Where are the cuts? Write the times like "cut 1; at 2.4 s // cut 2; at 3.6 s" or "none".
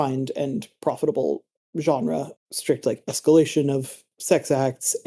cut 1; at 2.3 s // cut 2; at 4.0 s